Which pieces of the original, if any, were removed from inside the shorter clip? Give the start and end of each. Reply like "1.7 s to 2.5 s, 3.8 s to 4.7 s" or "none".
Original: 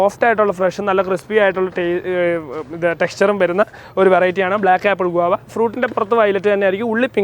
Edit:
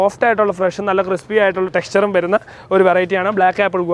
1.7 s to 3.0 s